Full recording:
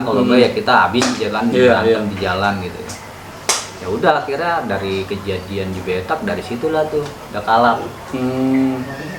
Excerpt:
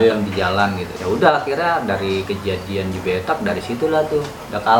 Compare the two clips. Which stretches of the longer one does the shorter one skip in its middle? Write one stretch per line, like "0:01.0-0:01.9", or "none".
0:02.8-0:03.7